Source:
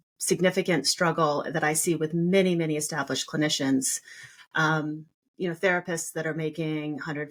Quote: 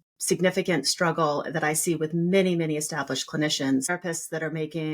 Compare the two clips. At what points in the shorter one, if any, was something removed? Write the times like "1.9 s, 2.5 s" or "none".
3.9 s